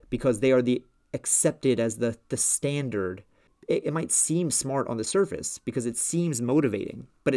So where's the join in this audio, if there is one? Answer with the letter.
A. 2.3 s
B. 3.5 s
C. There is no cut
B